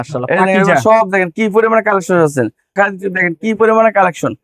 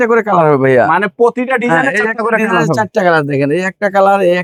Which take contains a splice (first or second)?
first